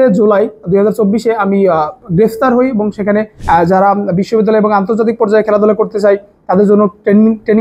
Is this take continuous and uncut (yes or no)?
no